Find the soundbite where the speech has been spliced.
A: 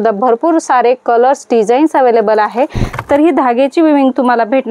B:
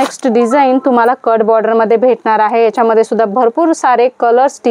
A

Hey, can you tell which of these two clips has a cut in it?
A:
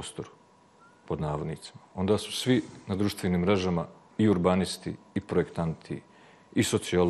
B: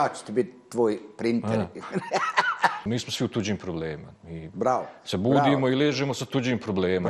B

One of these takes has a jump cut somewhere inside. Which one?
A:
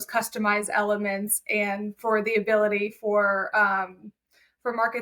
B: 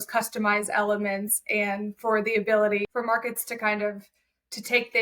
B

